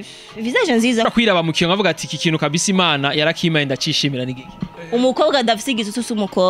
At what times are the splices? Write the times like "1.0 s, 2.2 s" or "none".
1.1 s, 4.7 s